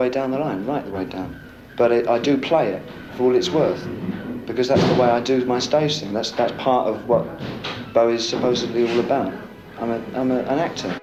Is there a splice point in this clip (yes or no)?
no